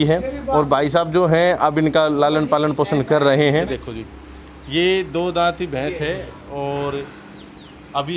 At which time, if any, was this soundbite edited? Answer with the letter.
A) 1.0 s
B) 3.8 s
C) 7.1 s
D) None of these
B